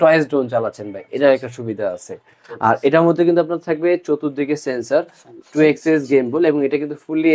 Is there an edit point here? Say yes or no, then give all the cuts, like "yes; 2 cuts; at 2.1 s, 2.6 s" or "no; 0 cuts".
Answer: no; 0 cuts